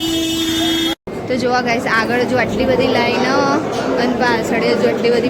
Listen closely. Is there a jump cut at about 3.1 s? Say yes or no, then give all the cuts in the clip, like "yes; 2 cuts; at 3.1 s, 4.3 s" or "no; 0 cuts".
no; 1 cut; at 1.1 s